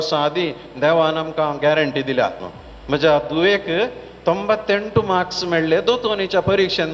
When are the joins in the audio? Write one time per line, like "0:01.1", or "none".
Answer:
0:02.5